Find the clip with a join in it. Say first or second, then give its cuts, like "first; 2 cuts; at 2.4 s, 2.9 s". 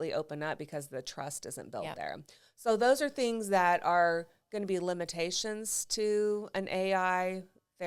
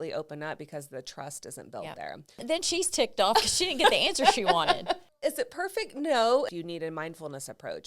second; 3 cuts; at 2.4 s, 5.1 s, 6.5 s